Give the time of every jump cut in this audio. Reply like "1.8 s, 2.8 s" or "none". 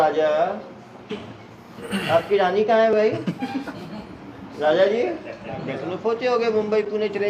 5.7 s